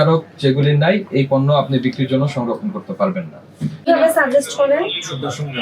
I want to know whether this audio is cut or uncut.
cut